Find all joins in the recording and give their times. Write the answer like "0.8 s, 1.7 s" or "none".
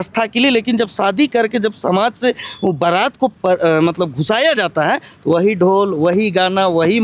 none